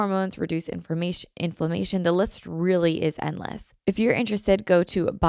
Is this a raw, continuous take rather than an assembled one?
no; 1 cut; at 3.7 s

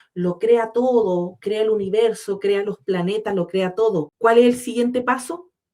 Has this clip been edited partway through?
yes; 1 cut; at 4.1 s

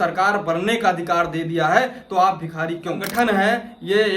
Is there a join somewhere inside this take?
yes; 1 cut; at 3.0 s

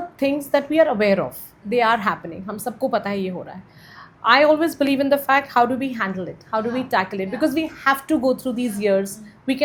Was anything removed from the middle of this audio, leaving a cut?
no; 0 cuts

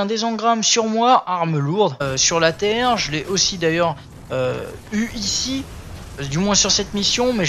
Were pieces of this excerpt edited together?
no; 0 cuts

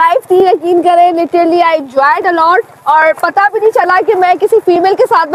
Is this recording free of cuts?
yes; 0 cuts

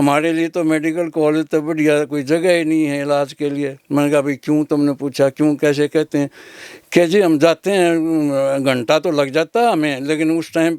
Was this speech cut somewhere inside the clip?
no; 0 cuts

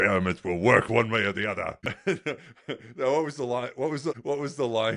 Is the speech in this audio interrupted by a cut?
yes; 1 cut; at 1.8 s

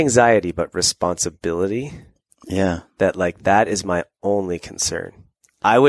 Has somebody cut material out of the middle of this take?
no; 0 cuts

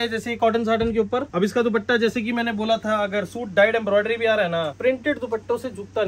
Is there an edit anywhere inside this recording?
yes; 2 cuts; at 1.3 s, 4.7 s

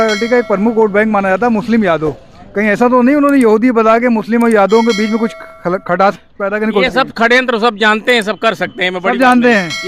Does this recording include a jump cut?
no; 0 cuts

